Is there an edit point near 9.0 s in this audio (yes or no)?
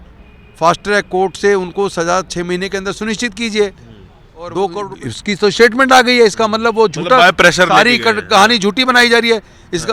no